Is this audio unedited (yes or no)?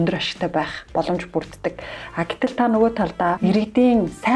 no